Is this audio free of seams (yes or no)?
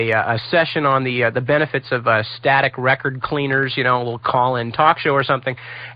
yes